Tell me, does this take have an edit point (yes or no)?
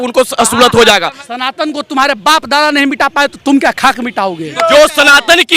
yes